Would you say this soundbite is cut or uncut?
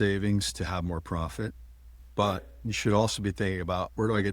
uncut